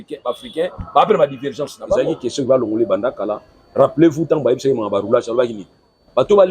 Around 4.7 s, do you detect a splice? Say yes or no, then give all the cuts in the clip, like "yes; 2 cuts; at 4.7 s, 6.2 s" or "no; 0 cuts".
no; 1 cut; at 2.0 s